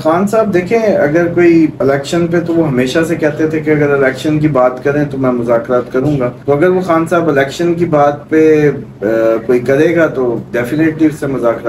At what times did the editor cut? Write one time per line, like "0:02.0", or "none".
0:01.8
0:06.4